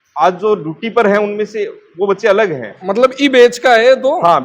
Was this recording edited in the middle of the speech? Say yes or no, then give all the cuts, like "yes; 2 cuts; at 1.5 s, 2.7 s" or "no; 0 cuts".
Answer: no; 0 cuts